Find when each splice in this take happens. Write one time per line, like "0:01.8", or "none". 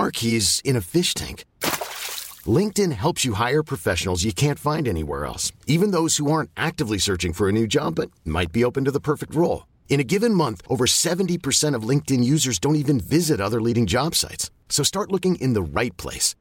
none